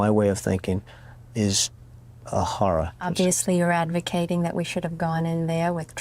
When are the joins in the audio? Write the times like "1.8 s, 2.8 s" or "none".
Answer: 3.1 s